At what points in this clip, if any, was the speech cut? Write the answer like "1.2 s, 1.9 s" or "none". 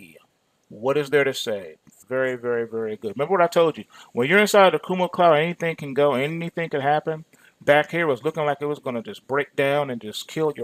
none